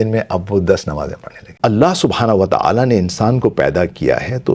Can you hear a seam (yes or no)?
yes